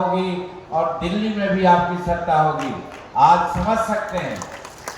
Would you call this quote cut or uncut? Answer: uncut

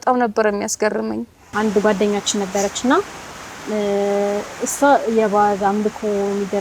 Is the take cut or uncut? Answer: cut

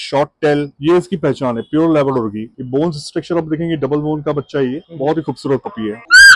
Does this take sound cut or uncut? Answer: uncut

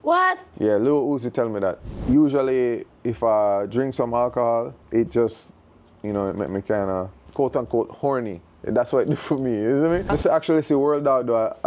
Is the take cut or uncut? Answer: cut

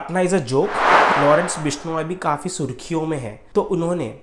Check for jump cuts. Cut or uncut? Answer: cut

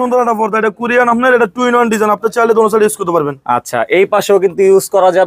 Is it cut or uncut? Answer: uncut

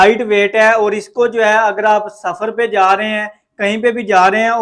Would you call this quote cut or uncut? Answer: uncut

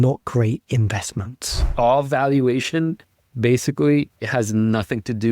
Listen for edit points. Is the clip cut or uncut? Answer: cut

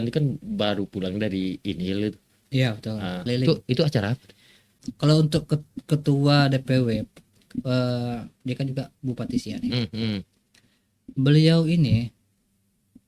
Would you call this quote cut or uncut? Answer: cut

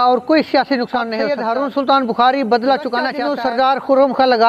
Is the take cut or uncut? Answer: cut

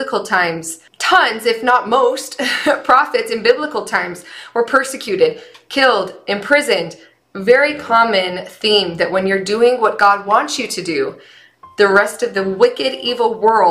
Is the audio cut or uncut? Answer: uncut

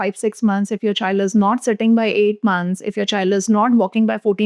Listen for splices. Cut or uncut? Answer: uncut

